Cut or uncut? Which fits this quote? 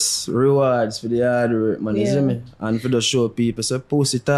uncut